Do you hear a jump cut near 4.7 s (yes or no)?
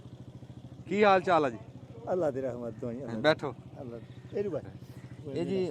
yes